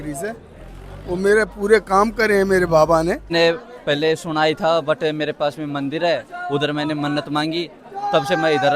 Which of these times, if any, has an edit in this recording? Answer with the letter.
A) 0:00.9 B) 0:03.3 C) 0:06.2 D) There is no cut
B